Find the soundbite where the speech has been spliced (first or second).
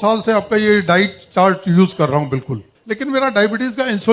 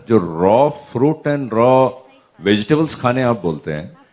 first